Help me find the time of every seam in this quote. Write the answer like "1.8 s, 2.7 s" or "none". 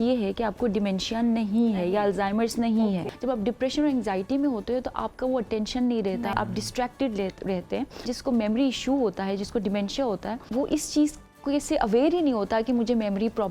3.1 s, 6.3 s, 8.1 s, 10.4 s